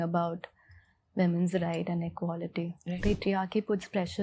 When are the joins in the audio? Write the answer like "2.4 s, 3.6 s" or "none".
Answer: 3.0 s